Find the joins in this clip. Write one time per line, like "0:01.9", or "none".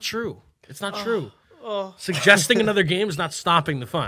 none